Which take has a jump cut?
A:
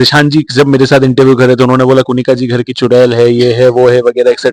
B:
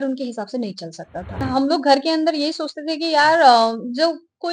B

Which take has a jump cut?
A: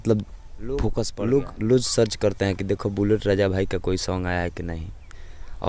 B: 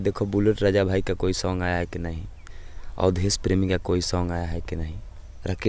A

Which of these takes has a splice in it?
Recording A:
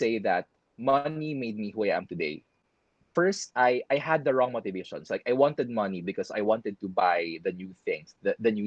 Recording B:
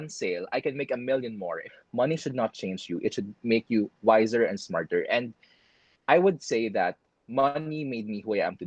B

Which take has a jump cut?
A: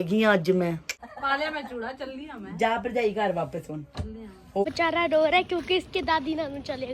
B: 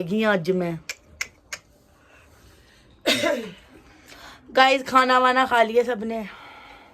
A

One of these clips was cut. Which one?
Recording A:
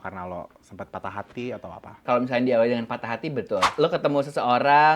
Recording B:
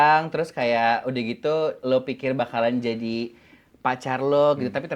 A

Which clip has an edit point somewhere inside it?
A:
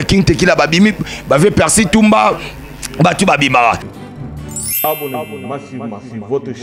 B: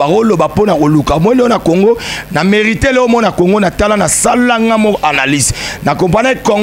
A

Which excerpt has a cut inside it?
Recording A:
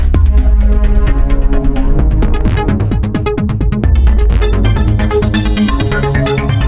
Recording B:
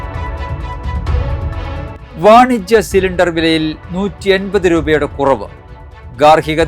B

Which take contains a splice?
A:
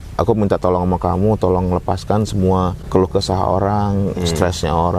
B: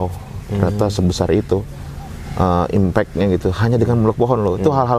A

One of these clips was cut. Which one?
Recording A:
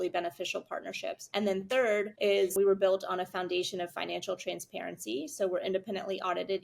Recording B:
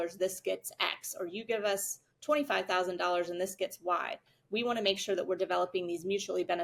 A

